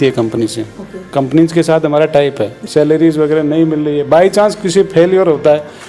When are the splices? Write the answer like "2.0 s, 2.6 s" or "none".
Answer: 2.6 s

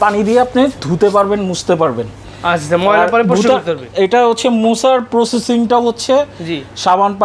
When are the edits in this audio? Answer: none

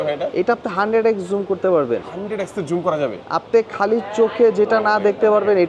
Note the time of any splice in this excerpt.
none

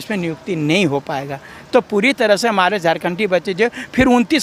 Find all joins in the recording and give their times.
none

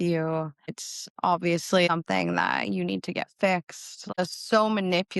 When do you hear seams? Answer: 1.9 s, 4.2 s

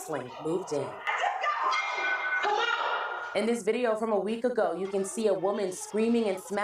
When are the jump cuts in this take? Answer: 3.2 s

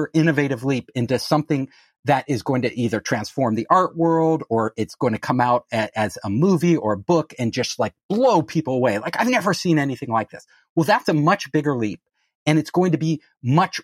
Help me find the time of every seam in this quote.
none

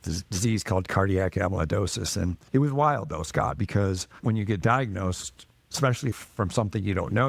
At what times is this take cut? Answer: 4.2 s

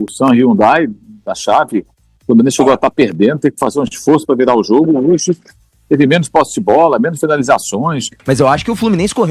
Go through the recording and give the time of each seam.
8.1 s

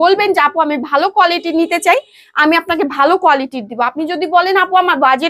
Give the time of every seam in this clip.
none

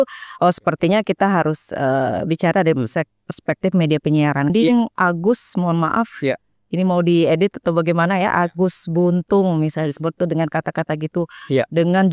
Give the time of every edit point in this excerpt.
4.5 s

